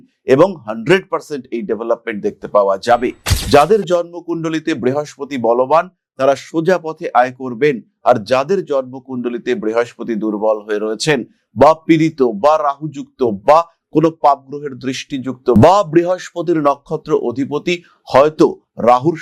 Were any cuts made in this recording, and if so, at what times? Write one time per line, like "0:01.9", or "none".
none